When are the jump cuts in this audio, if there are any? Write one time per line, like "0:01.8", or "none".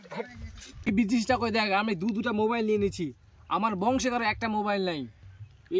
0:00.9